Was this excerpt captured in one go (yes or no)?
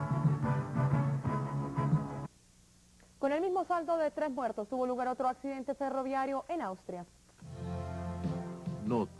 yes